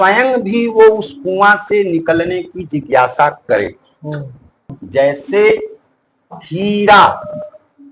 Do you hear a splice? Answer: yes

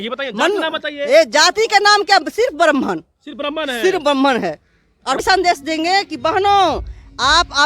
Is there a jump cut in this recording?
yes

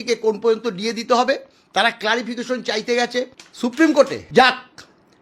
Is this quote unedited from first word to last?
no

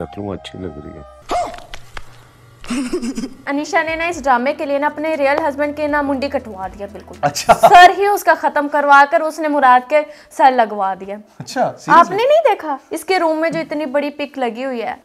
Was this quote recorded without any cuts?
no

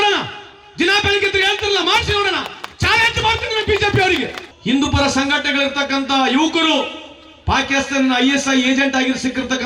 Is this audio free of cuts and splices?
no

